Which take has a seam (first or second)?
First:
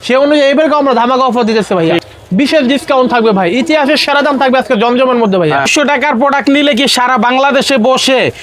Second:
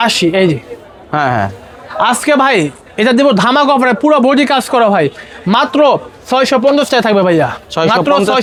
first